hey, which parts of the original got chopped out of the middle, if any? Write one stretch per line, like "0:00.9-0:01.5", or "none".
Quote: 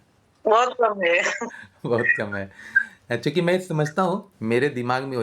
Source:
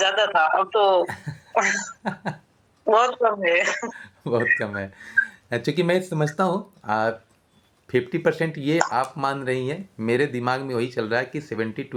0:06.7-0:09.9